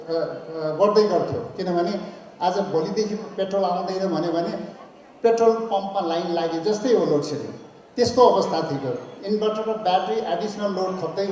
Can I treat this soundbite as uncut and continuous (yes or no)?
yes